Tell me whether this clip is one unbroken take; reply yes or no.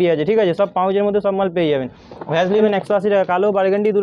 no